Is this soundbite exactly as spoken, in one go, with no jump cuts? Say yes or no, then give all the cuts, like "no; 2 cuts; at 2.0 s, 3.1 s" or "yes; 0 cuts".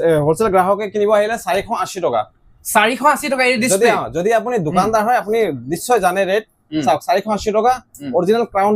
yes; 0 cuts